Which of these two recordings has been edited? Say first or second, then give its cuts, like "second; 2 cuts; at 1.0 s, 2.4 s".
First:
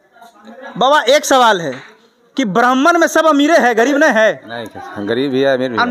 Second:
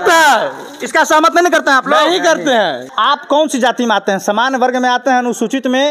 second; 1 cut; at 2.9 s